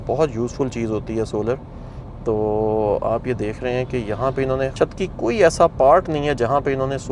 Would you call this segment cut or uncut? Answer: uncut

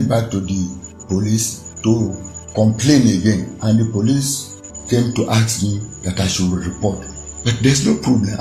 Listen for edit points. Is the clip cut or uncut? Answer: uncut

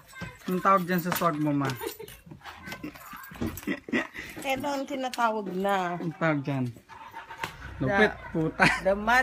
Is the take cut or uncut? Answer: uncut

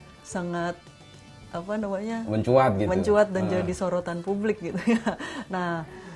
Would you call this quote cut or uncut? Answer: uncut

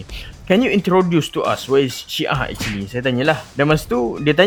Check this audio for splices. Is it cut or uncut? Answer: uncut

